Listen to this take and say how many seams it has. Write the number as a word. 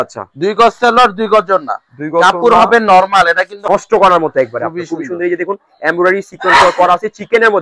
one